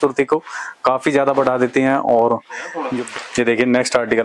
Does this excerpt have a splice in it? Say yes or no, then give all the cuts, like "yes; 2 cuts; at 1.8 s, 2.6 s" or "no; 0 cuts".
yes; 1 cut; at 2.8 s